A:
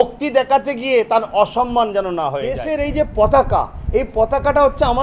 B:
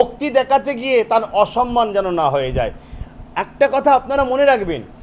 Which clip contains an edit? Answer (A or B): A